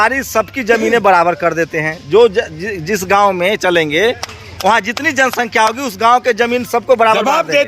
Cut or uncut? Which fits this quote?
uncut